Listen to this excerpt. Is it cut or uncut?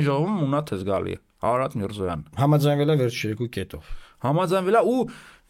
uncut